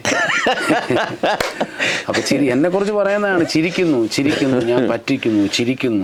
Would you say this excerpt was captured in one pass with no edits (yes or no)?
yes